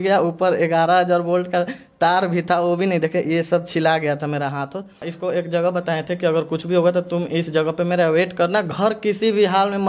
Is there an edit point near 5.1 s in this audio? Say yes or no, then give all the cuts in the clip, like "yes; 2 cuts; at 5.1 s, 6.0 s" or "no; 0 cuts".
yes; 1 cut; at 5.1 s